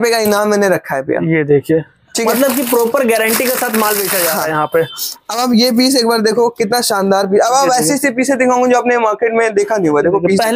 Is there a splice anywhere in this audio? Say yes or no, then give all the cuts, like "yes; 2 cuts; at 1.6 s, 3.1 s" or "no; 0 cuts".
no; 0 cuts